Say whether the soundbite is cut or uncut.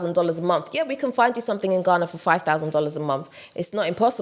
uncut